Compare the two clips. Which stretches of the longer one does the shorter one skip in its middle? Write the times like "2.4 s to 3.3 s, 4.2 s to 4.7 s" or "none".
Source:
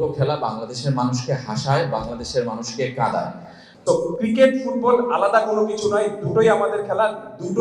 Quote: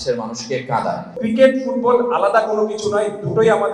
3.4 s to 4.2 s